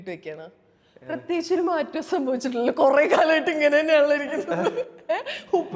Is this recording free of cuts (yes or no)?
yes